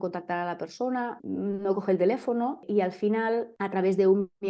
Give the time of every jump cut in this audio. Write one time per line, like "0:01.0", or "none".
0:01.2
0:02.6
0:03.5